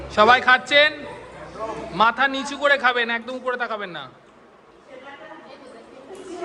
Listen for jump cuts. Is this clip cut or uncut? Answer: uncut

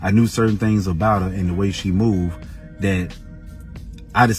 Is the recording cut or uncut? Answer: uncut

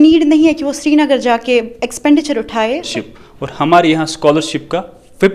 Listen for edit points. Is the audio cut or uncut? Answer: cut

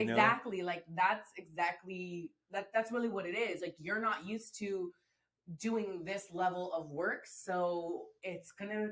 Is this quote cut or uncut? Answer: uncut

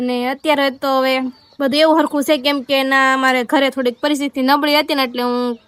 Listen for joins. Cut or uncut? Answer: uncut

